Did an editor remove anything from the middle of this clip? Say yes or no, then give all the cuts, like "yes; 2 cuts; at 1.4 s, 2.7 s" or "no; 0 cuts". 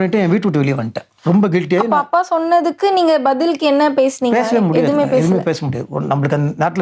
no; 0 cuts